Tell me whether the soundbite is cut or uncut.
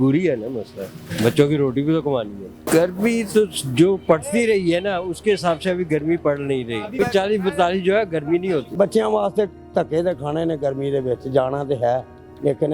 cut